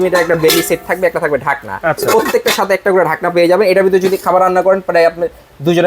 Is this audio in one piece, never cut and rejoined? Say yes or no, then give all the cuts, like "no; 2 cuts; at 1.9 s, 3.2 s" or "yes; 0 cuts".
yes; 0 cuts